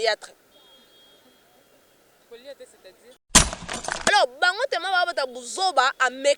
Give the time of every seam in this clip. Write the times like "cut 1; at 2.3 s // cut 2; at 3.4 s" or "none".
cut 1; at 3.6 s